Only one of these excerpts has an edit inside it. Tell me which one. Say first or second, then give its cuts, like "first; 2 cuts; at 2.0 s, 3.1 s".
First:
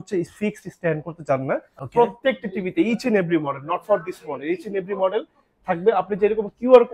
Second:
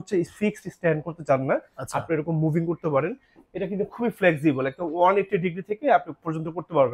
first; 1 cut; at 1.8 s